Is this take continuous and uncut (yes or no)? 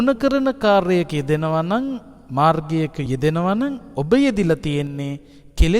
no